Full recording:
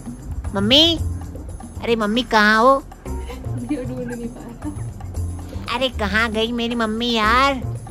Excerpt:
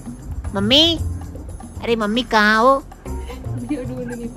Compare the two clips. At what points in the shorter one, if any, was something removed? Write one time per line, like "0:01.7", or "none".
none